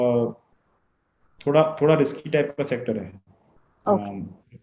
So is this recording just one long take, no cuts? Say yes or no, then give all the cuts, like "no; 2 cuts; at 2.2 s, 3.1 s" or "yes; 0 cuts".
yes; 0 cuts